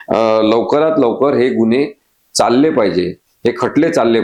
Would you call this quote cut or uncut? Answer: uncut